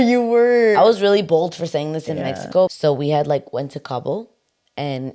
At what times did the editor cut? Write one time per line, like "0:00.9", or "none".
none